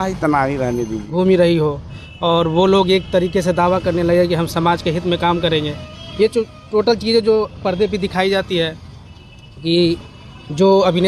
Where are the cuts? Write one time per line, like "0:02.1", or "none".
0:01.1

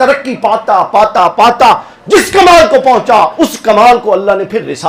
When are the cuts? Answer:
none

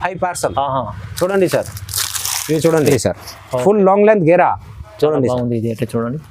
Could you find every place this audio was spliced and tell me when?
0:02.9

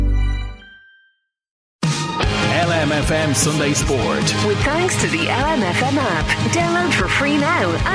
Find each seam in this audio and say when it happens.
0:01.6

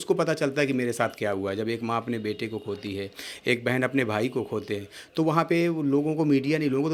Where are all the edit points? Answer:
none

